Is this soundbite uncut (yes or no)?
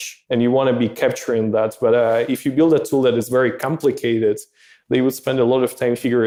yes